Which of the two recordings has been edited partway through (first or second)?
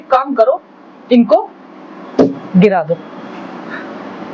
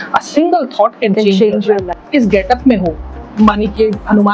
second